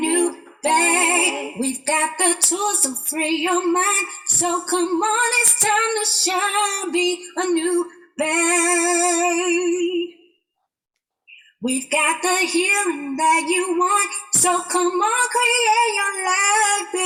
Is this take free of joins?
yes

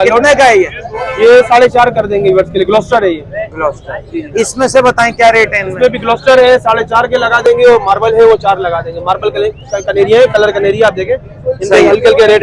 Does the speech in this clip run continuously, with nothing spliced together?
yes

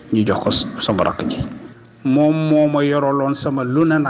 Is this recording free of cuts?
no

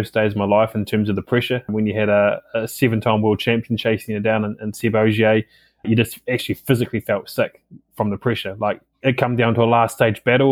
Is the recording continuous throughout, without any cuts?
no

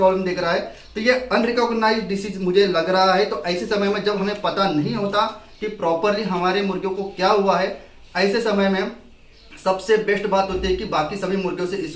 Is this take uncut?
yes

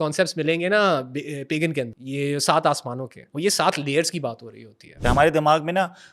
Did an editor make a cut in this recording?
yes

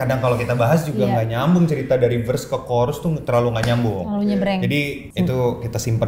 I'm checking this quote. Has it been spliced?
yes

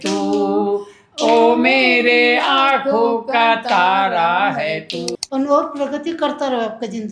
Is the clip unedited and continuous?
no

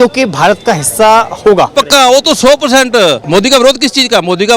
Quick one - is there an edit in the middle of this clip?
yes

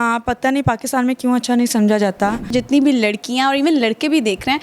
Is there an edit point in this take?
yes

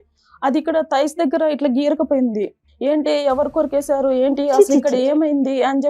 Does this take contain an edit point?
yes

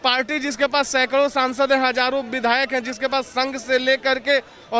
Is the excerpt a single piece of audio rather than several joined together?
yes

